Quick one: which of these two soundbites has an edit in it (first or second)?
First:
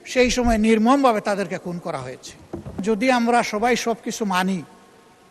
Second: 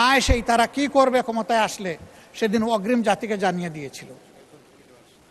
first